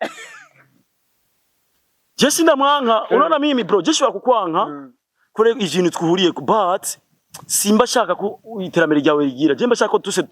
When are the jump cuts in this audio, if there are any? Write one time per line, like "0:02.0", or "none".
none